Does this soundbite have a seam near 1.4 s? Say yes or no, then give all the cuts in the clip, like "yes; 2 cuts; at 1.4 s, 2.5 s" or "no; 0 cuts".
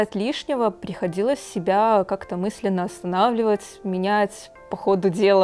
no; 0 cuts